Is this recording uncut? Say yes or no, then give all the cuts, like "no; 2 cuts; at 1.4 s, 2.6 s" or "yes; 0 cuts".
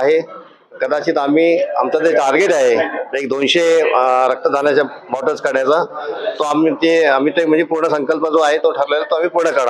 yes; 0 cuts